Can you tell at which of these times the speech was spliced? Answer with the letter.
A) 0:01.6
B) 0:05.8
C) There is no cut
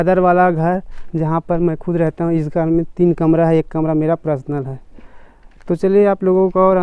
C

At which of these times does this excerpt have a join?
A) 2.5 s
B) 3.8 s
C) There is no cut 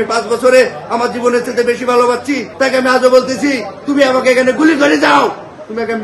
A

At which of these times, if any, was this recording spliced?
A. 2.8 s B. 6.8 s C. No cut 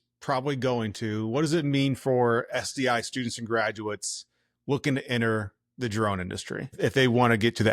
B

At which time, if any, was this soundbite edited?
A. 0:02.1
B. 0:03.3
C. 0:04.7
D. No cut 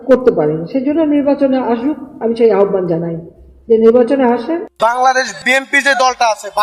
C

